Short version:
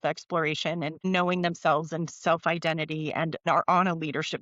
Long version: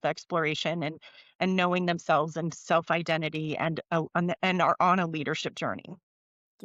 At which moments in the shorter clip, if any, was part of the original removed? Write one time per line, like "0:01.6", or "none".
0:01.0
0:03.4